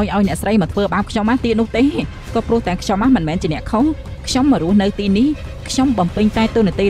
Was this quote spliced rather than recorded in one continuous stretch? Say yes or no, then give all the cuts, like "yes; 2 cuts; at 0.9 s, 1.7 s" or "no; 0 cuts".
no; 0 cuts